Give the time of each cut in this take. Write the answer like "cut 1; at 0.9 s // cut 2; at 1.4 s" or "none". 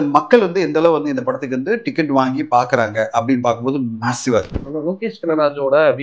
cut 1; at 4.6 s